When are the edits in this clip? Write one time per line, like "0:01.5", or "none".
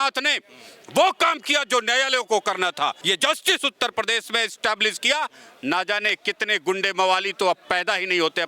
0:03.0